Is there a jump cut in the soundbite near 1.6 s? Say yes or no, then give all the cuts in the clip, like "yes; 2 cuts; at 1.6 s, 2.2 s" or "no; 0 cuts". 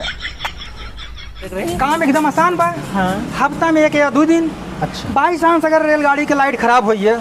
yes; 1 cut; at 1.6 s